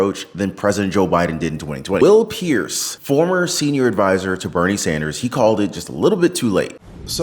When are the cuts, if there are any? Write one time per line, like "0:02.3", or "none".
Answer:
0:02.0